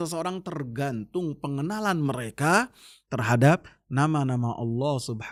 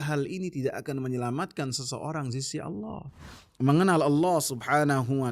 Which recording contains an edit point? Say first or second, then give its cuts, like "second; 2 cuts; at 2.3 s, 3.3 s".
second; 1 cut; at 3.4 s